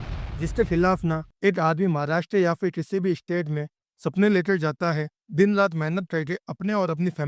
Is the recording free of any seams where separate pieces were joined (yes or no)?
no